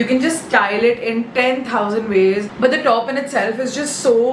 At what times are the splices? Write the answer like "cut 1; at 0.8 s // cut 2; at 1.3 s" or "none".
cut 1; at 2.5 s